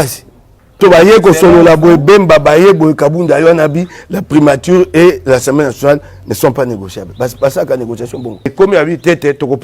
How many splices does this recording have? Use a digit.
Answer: 2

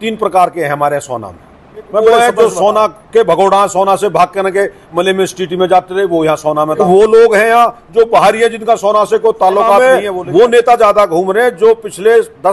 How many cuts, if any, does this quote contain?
3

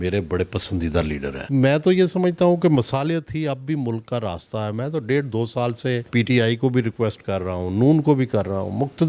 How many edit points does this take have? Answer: 2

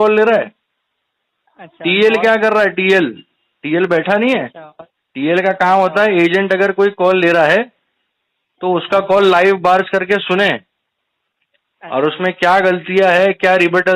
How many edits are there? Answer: 0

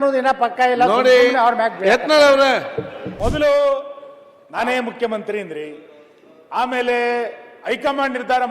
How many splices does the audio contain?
1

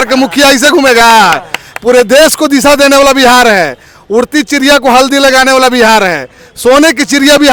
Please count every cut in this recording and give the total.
0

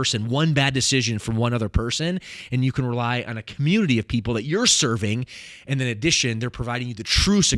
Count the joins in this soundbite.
0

